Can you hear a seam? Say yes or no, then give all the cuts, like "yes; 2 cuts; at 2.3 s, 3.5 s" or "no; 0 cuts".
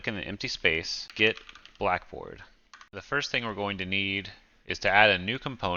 yes; 2 cuts; at 1.0 s, 2.9 s